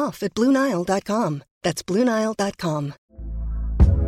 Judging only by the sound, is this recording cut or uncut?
cut